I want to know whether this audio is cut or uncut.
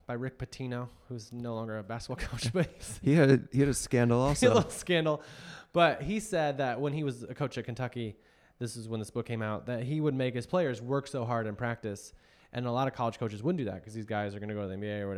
uncut